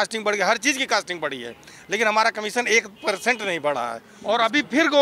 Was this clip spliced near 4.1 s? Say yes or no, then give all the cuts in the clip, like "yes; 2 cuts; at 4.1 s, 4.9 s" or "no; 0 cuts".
yes; 1 cut; at 4.1 s